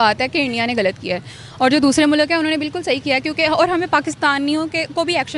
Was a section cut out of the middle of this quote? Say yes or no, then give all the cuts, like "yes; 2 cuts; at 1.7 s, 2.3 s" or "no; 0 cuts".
no; 0 cuts